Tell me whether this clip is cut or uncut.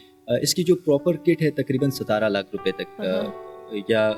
uncut